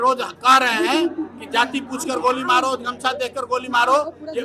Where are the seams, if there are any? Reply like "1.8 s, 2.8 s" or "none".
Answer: none